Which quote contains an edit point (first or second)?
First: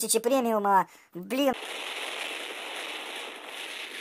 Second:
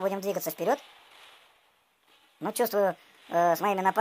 first